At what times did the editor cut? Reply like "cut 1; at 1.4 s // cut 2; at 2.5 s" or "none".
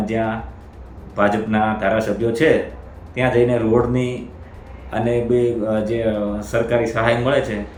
none